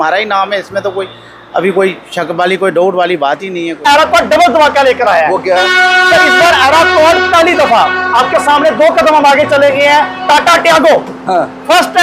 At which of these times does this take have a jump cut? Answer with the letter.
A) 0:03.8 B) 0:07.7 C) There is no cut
A